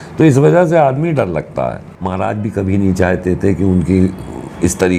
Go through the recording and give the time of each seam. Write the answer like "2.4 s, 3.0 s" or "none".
1.9 s

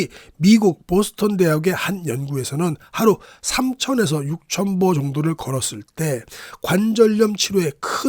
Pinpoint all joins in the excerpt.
none

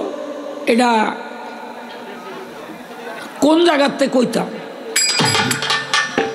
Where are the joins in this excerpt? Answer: none

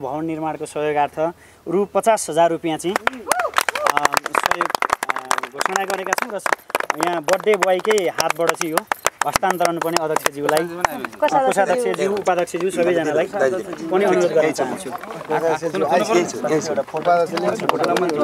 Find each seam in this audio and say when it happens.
none

